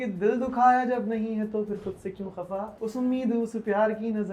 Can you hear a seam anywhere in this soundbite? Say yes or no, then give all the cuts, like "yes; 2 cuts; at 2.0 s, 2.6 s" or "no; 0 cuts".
yes; 1 cut; at 2.7 s